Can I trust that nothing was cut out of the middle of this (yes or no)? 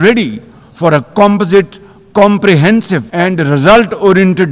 no